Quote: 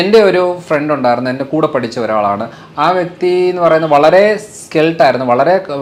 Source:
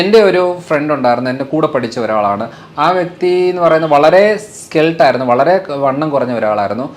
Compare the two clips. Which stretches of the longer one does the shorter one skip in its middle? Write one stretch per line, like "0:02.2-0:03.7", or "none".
none